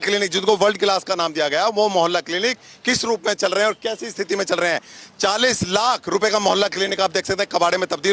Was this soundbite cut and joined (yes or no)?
no